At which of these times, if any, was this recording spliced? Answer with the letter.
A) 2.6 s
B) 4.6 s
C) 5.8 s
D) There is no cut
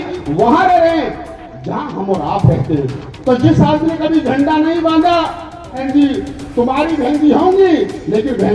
C